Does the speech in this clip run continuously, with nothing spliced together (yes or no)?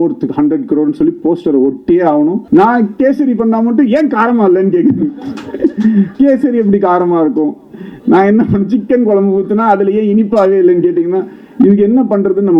no